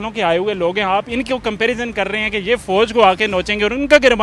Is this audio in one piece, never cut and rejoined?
yes; 0 cuts

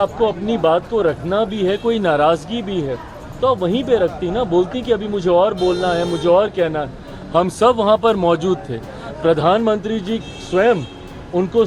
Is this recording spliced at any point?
no; 0 cuts

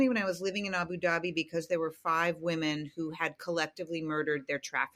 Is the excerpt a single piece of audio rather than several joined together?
yes; 0 cuts

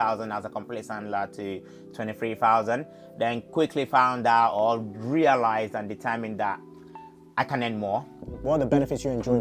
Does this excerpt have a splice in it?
yes; 1 cut; at 8.3 s

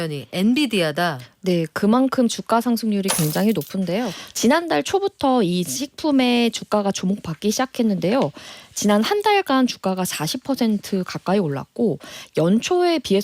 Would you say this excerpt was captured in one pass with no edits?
no; 1 cut; at 4.2 s

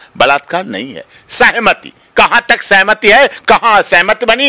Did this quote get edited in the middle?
no; 0 cuts

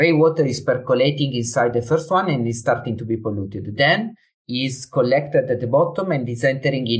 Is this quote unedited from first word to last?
yes; 0 cuts

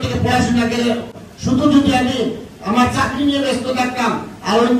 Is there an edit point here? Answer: yes; 1 cut; at 1.1 s

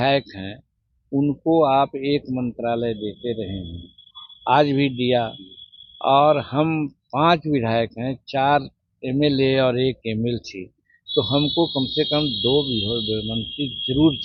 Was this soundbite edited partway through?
no; 0 cuts

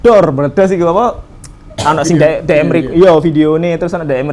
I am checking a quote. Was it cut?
no; 0 cuts

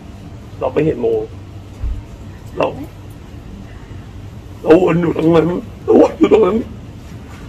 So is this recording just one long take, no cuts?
no; 1 cut; at 5.7 s

